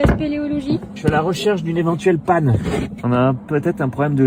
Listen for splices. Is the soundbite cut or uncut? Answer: cut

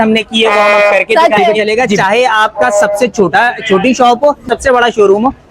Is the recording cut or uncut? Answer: cut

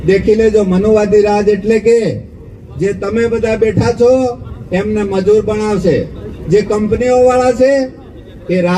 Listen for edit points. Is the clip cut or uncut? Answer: uncut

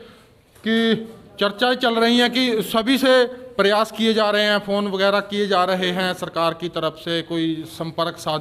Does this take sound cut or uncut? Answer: uncut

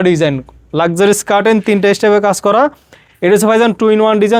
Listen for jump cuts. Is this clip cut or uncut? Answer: uncut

